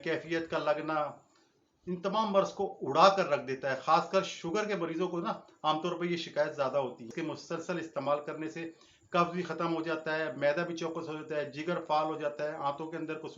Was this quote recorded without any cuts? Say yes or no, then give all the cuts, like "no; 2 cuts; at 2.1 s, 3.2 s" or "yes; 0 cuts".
no; 1 cut; at 7.1 s